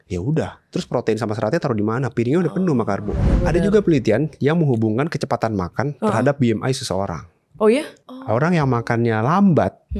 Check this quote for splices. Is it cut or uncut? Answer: cut